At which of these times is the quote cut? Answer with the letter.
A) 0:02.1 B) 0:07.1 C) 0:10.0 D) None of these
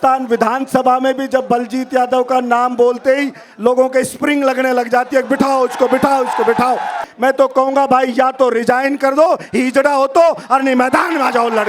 B